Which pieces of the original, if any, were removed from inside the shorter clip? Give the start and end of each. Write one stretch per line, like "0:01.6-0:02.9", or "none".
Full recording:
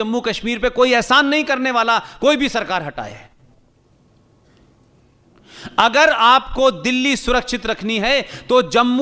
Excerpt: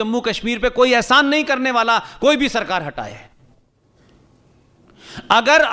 0:03.8-0:04.3